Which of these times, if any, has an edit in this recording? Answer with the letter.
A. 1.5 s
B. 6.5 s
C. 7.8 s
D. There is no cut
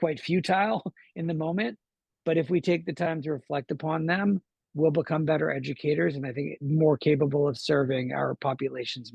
D